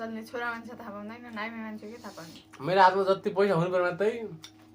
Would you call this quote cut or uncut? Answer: cut